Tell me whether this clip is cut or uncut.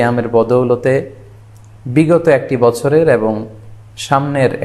uncut